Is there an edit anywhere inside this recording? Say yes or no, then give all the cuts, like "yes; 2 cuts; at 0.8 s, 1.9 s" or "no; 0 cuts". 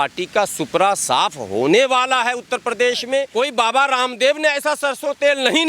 yes; 1 cut; at 3.3 s